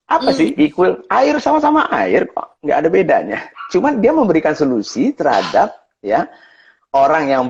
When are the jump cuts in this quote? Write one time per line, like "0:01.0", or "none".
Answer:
none